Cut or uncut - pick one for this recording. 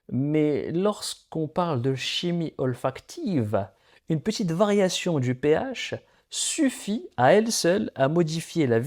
uncut